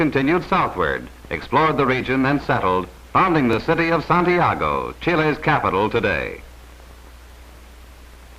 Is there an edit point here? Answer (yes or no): no